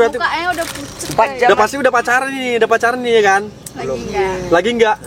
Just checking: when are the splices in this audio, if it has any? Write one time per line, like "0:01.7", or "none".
0:01.5